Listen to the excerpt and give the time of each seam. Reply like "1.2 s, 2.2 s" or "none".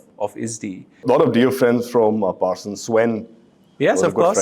1.0 s